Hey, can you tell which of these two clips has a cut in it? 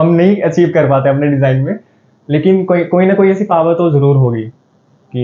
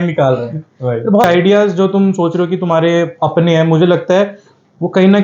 second; 1 cut; at 1.2 s

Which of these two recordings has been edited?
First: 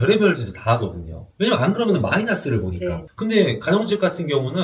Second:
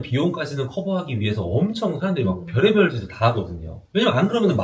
first; 1 cut; at 3.0 s

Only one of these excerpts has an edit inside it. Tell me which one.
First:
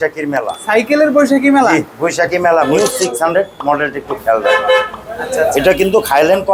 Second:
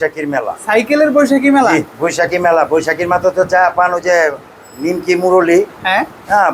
first; 1 cut; at 2.7 s

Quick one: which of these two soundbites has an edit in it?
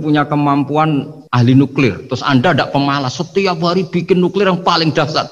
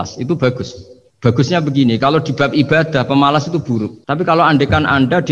first; 1 cut; at 1.2 s

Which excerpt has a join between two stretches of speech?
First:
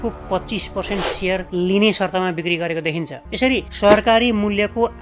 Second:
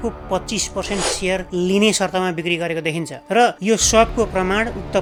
first; 1 cut; at 3.2 s

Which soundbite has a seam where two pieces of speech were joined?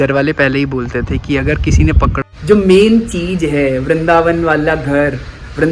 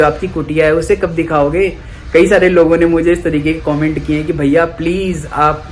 first; 1 cut; at 2.2 s

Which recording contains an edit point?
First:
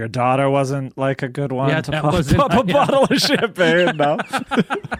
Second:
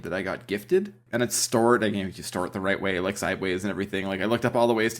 second; 1 cut; at 1.0 s

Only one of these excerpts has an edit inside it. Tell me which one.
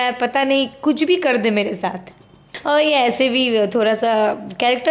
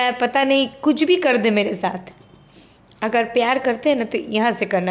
first; 1 cut; at 2.5 s

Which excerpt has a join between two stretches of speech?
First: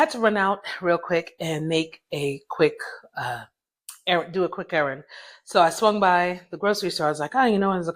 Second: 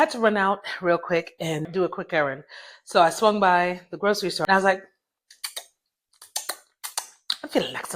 second; 2 cuts; at 1.7 s, 4.4 s

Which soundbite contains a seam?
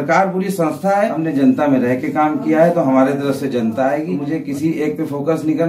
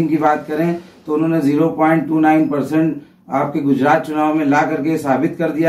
first; 2 cuts; at 1.2 s, 4.1 s

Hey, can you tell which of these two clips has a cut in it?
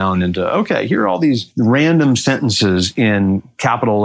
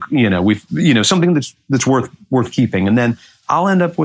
first; 1 cut; at 1.5 s

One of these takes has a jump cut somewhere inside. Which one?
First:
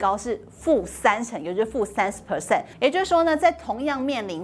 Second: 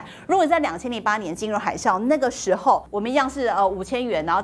first; 1 cut; at 2.7 s

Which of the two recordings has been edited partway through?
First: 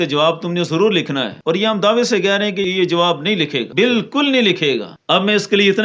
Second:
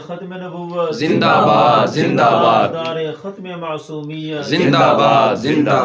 first; 4 cuts; at 1.3 s, 2.7 s, 3.6 s, 4.9 s

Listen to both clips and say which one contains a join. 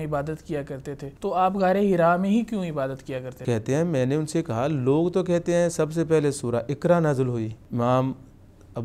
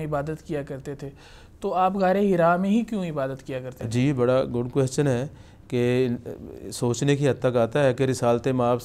first; 3 cuts; at 1.1 s, 3.3 s, 7.6 s

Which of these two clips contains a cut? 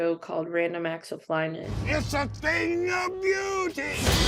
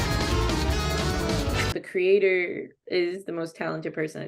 second; 1 cut; at 2.8 s

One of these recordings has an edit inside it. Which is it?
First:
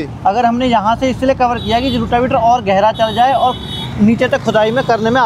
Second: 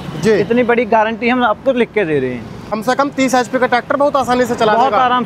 second; 1 cut; at 2.8 s

